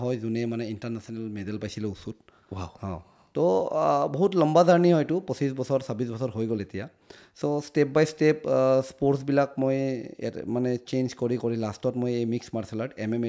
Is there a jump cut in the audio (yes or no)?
no